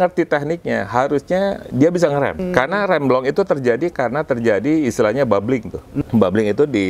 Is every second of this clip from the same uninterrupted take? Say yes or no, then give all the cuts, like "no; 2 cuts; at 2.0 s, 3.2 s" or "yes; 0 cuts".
no; 2 cuts; at 2.4 s, 5.9 s